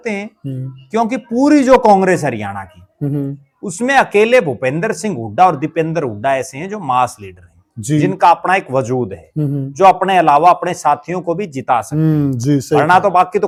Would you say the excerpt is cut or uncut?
uncut